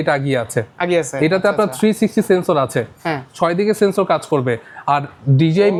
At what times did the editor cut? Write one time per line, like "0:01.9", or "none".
none